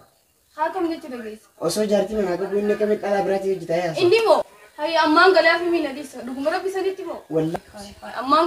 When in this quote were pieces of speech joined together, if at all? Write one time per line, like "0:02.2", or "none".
none